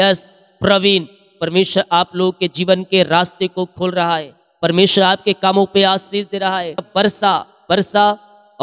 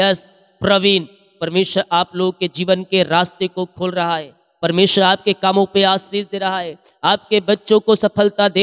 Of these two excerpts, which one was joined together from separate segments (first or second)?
first